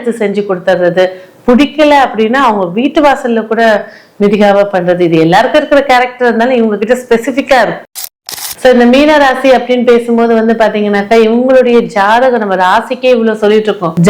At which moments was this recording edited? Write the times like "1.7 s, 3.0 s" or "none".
7.9 s